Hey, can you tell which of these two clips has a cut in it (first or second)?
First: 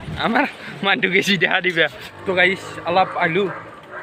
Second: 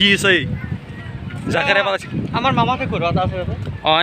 first